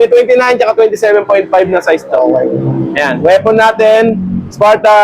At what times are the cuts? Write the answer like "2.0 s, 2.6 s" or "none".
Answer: none